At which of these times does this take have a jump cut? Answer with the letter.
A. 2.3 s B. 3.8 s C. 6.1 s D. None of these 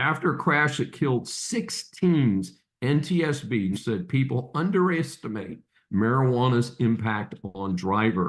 B